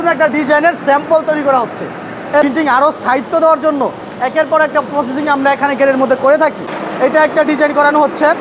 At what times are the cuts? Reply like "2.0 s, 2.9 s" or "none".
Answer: 2.4 s, 6.8 s